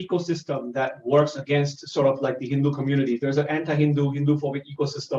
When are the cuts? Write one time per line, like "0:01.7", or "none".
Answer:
none

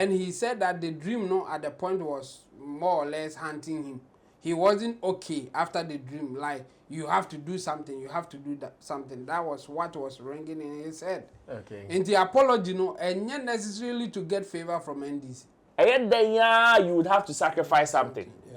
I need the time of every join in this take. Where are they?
0:15.6

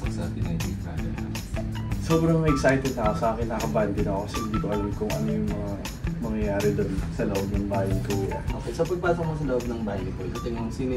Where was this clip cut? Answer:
none

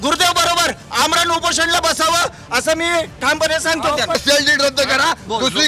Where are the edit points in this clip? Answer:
0:04.2

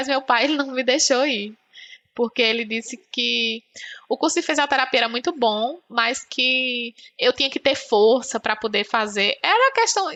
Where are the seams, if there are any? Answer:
none

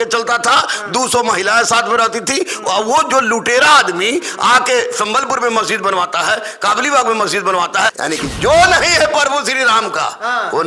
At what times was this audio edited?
0:07.9

